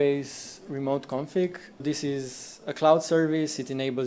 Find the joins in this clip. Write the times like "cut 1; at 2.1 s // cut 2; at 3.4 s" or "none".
cut 1; at 1.8 s